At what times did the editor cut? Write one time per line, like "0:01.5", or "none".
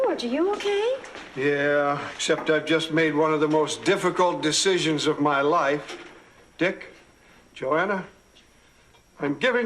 0:03.4

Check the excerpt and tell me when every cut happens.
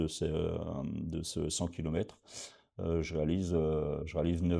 none

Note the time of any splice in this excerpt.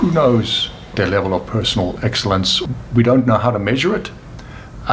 0:00.9
0:02.6

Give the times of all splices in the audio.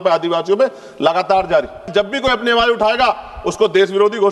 0:01.9

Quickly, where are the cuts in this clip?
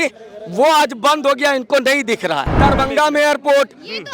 0:02.5

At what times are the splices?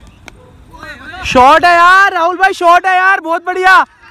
none

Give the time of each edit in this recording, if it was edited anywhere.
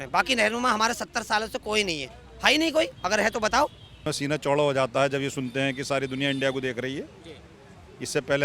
0:04.1

